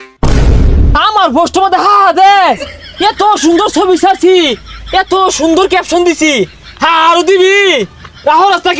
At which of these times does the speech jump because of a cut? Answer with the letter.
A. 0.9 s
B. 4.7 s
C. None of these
A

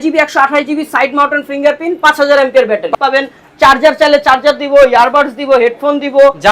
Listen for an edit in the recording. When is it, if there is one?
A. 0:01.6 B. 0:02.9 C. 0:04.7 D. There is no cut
B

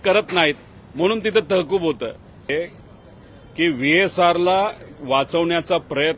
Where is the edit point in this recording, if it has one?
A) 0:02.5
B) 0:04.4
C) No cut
A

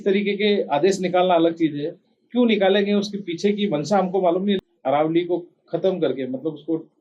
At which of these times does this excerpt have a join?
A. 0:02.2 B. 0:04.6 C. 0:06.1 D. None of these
B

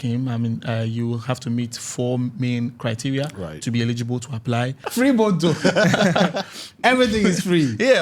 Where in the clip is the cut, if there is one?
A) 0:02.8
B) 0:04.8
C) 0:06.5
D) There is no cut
B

